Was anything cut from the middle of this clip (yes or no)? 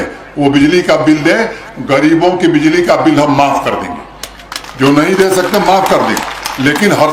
no